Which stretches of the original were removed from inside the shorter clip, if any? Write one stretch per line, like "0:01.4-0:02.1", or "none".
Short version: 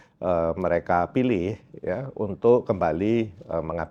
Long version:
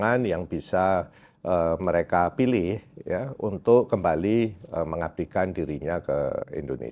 none